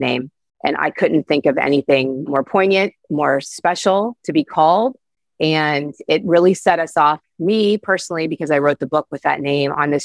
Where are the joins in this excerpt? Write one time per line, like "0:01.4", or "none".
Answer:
0:02.3
0:03.0